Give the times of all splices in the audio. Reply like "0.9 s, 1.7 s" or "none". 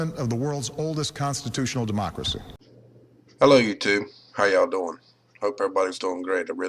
2.4 s